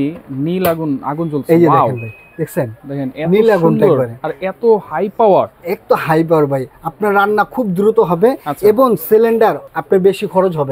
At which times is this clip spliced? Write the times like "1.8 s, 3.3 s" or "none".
9.7 s